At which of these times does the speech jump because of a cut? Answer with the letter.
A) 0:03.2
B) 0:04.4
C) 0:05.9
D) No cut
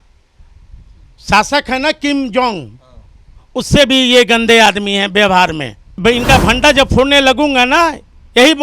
C